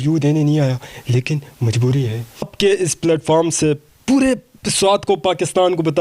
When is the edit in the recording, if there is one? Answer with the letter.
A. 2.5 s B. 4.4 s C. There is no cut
A